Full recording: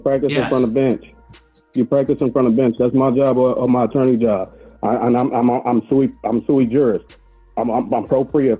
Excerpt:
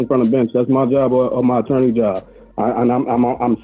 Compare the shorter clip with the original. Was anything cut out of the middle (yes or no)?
no